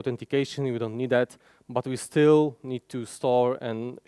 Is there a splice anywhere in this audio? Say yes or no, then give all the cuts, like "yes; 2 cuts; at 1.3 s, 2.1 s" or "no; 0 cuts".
no; 0 cuts